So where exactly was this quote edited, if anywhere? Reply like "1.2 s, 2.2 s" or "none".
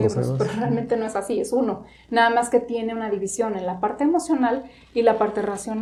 none